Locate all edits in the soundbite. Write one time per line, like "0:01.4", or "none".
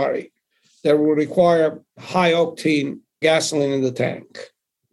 0:01.9
0:03.2

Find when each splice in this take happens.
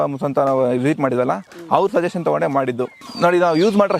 0:03.0

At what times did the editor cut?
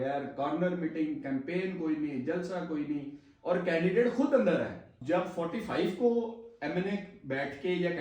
0:04.9

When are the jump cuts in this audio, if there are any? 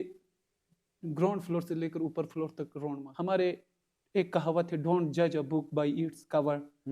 0:03.0

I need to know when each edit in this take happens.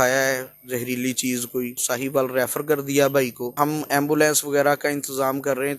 0:01.9
0:03.4

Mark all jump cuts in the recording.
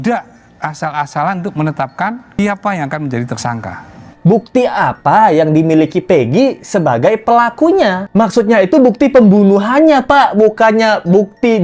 0:02.2
0:04.1

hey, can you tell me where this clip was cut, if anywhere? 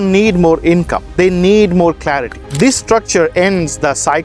0:02.4

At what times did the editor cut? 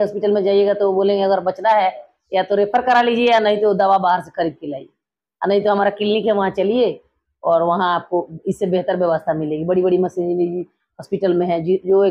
none

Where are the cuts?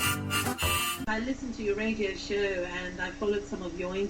0:01.0

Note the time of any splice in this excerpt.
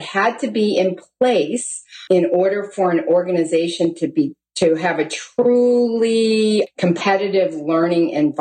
0:02.0
0:06.7

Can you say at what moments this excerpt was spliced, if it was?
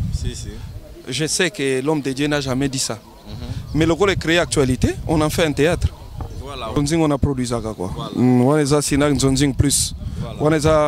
0:06.8

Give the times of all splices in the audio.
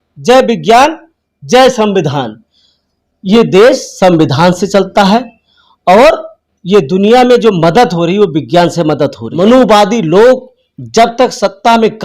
0:09.4

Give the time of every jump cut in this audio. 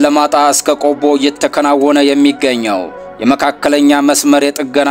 none

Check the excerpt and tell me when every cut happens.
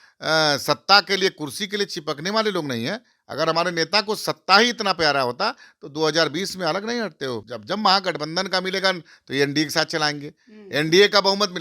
0:07.4

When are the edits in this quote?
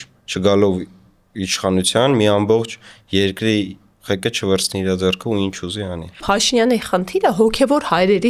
0:06.2

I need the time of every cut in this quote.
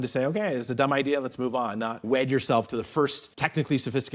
0:01.9
0:03.3

